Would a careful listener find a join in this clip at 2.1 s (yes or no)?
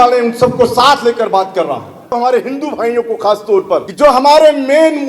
yes